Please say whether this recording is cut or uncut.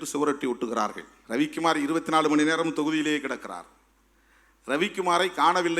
cut